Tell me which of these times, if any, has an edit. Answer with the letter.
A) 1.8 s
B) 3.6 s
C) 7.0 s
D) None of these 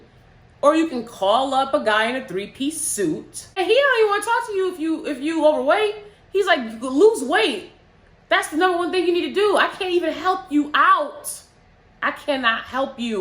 B